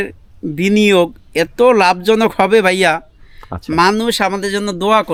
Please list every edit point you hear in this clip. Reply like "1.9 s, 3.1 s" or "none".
none